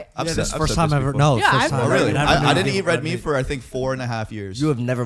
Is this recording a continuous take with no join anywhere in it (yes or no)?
yes